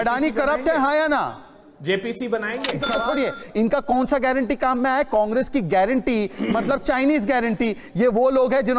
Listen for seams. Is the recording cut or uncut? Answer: cut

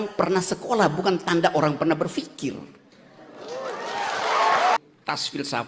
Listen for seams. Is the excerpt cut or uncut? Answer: cut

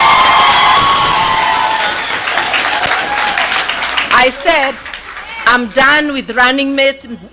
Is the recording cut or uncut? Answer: uncut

